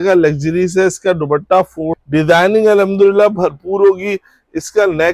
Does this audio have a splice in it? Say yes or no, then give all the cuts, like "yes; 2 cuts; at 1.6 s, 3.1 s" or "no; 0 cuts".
yes; 1 cut; at 1.9 s